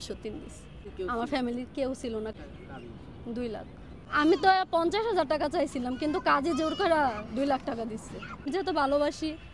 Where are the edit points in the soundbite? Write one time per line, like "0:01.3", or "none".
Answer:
0:00.9
0:02.3
0:03.9
0:08.5